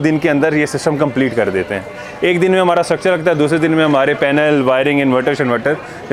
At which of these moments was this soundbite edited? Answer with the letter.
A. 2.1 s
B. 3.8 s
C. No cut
C